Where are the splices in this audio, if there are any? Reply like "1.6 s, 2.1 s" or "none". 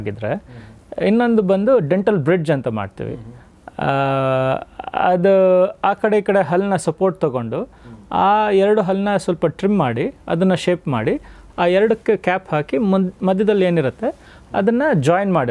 none